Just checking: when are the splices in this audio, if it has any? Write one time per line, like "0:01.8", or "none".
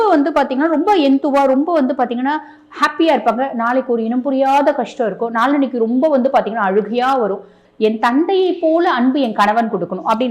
0:07.6